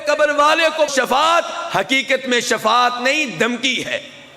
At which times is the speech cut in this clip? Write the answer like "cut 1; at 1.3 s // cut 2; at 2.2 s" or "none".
cut 1; at 0.9 s